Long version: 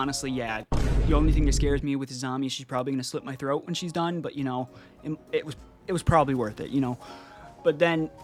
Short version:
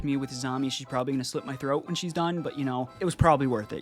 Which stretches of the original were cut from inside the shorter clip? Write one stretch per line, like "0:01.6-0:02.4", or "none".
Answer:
0:04.7-0:05.8